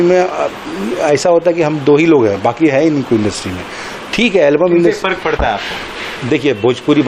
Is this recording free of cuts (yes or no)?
yes